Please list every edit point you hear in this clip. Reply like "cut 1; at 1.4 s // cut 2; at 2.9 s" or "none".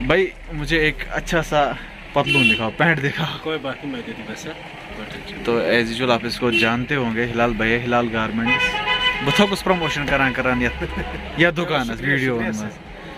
none